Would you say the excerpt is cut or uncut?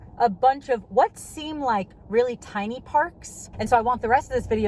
cut